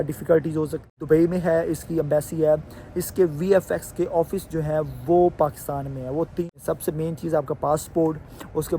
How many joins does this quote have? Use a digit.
2